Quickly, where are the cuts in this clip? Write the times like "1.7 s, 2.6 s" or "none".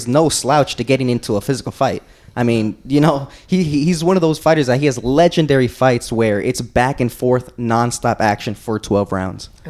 none

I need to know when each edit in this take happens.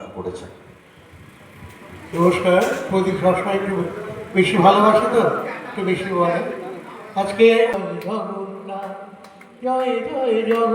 7.8 s

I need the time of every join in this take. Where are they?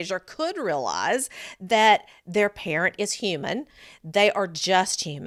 none

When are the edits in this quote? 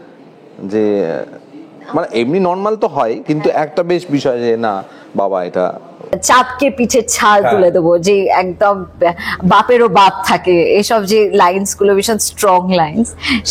6.1 s

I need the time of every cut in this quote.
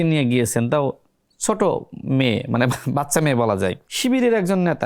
3.9 s

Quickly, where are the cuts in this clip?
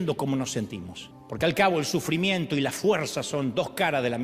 none

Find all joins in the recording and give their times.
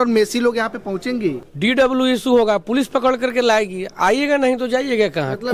1.5 s

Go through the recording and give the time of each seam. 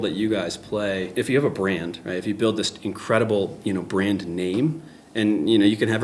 1.1 s

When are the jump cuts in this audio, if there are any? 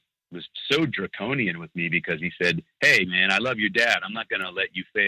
none

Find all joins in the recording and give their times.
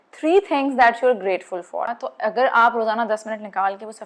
2.0 s

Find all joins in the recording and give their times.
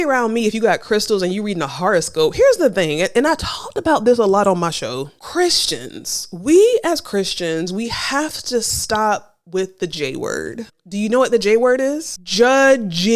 none

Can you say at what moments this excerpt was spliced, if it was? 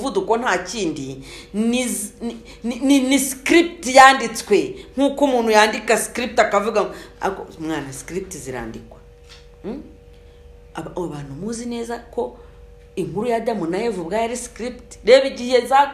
none

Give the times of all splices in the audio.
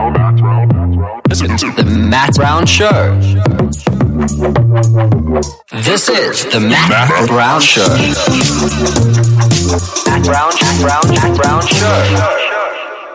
none

